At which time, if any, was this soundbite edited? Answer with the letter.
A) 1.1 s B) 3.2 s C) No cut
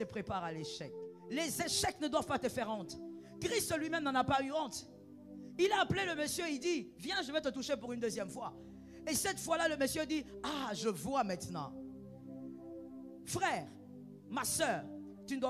A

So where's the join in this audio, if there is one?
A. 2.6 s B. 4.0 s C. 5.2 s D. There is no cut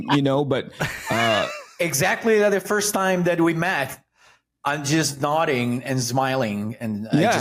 D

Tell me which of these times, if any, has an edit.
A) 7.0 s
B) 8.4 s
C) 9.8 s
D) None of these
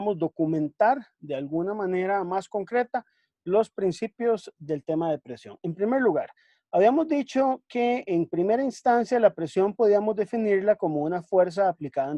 D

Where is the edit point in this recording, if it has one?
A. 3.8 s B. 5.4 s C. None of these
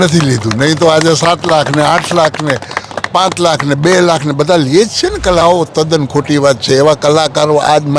B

